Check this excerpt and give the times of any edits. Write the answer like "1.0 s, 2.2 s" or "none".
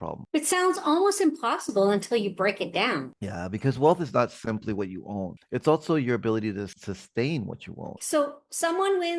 7.9 s

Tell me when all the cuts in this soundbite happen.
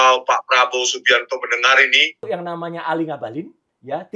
2.2 s

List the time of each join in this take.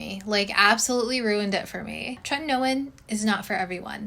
2.2 s

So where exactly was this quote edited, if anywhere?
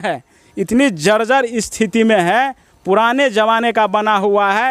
none

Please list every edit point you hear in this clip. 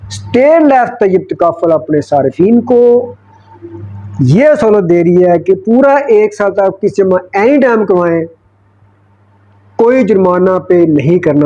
none

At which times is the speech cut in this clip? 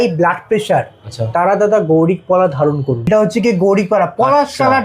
3.1 s

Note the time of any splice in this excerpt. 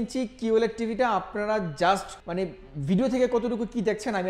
2.2 s

